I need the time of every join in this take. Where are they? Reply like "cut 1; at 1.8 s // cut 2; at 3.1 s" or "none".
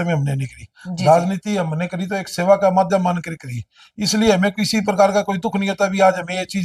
none

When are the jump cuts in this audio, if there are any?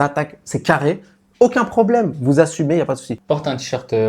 cut 1; at 3.1 s

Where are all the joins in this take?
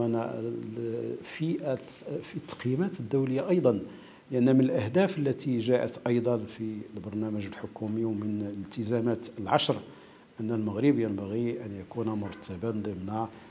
none

